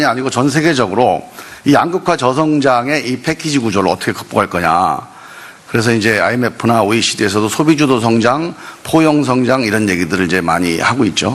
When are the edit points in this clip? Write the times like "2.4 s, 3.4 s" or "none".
7.4 s